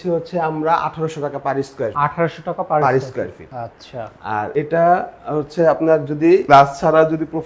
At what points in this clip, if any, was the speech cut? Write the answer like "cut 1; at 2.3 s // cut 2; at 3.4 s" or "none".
none